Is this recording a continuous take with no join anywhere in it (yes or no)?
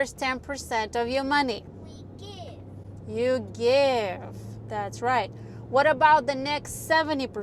yes